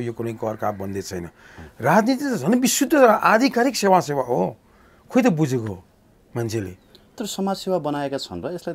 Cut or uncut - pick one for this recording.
uncut